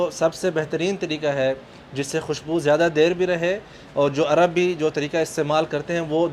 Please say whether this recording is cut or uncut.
uncut